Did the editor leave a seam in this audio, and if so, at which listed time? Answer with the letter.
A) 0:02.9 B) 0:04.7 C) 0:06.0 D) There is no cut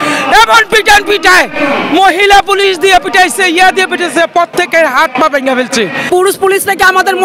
C